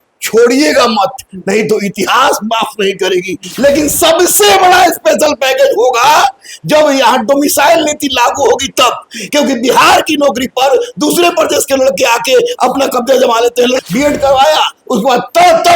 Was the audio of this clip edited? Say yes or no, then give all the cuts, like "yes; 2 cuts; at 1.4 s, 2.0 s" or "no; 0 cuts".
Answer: yes; 2 cuts; at 3.4 s, 13.8 s